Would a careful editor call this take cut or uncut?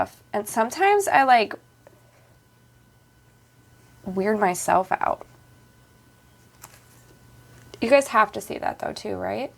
uncut